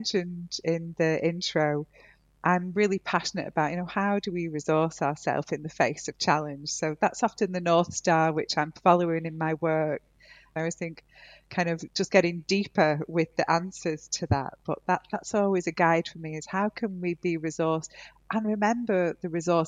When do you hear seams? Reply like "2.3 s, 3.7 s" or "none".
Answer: 10.5 s